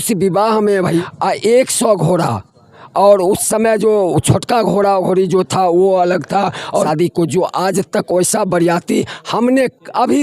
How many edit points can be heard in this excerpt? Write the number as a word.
two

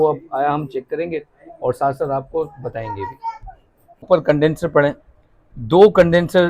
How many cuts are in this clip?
one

